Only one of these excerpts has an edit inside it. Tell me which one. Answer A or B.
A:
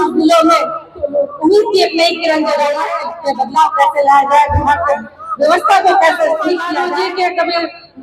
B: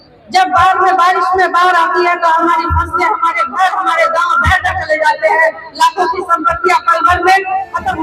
A